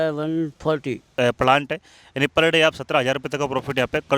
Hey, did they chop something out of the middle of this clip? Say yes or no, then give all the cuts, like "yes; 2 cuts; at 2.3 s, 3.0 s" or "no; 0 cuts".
yes; 1 cut; at 1.2 s